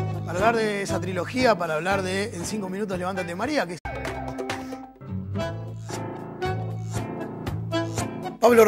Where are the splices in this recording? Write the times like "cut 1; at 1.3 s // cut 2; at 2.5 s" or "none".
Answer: none